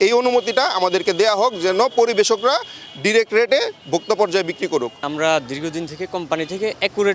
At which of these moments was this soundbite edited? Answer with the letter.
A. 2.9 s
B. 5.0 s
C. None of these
B